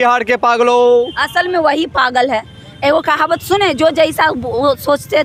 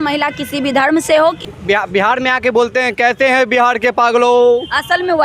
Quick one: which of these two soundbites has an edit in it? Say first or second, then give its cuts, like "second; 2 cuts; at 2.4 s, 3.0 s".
second; 1 cut; at 1.5 s